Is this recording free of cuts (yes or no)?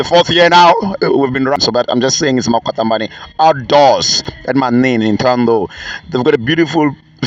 no